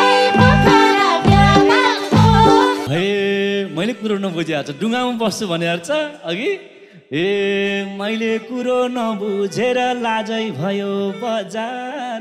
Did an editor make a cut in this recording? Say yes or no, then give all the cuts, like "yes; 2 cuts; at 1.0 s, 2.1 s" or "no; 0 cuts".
yes; 1 cut; at 2.8 s